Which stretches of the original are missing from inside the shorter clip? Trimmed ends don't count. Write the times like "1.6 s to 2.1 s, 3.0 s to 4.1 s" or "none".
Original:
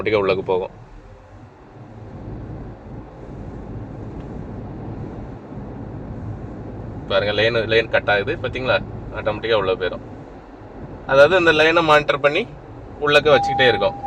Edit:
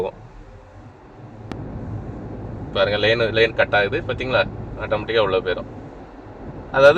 2.1 s to 5.9 s